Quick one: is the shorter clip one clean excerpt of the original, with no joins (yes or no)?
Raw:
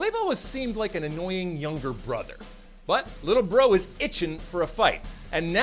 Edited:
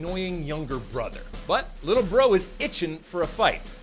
no